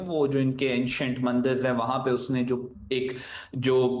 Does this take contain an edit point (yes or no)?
no